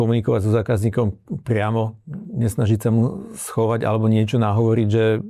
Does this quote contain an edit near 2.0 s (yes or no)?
no